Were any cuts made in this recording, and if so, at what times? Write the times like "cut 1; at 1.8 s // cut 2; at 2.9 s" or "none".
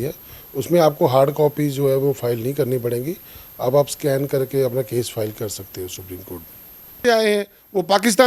cut 1; at 7.0 s